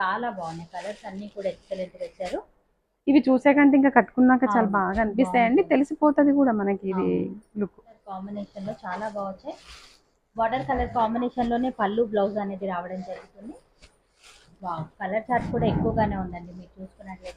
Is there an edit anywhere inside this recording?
yes; 1 cut; at 8.1 s

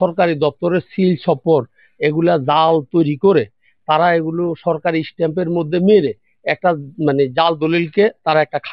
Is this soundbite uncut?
yes; 0 cuts

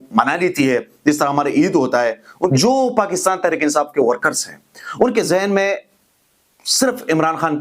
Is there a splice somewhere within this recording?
yes; 1 cut; at 2.5 s

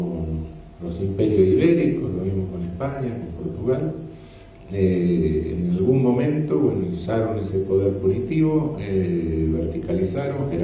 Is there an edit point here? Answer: no; 0 cuts

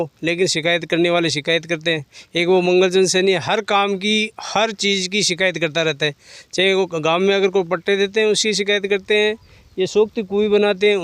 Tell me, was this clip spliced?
no; 0 cuts

